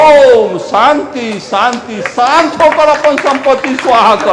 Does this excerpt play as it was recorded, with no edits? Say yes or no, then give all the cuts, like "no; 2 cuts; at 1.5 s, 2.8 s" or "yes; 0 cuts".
yes; 0 cuts